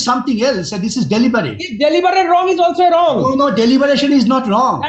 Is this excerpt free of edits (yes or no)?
yes